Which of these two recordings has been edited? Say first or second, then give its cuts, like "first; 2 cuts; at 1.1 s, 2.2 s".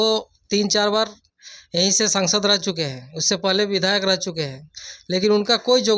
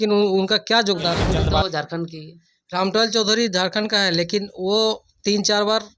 second; 1 cut; at 1.4 s